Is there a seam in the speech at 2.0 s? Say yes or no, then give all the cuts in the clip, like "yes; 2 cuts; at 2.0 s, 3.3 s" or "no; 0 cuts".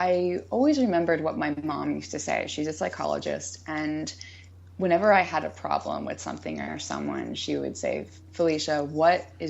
no; 0 cuts